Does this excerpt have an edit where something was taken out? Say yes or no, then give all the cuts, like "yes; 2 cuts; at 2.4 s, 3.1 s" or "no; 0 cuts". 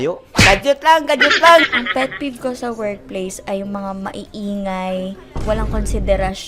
no; 0 cuts